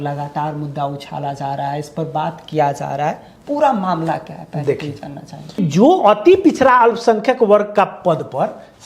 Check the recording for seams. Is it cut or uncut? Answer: cut